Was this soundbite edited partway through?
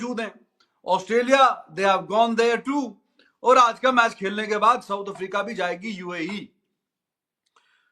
no; 0 cuts

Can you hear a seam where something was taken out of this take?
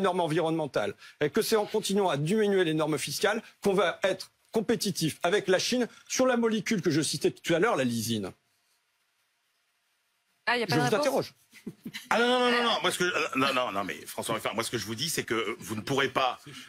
no; 0 cuts

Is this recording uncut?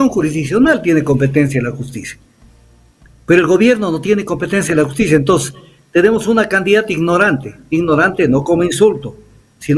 yes; 0 cuts

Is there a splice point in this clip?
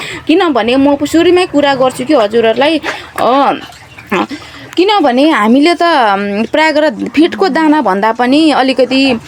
no; 0 cuts

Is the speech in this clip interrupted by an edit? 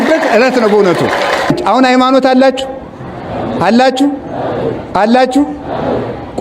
yes; 1 cut; at 1.5 s

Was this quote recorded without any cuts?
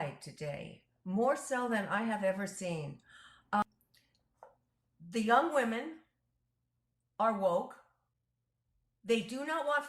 no; 1 cut; at 3.6 s

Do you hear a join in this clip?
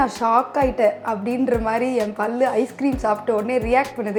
no; 0 cuts

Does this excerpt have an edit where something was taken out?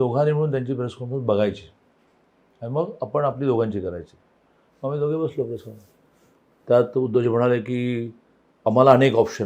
no; 0 cuts

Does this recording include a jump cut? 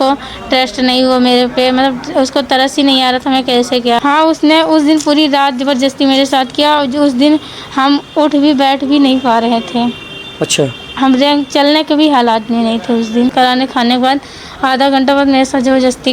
yes; 2 cuts; at 4.0 s, 13.1 s

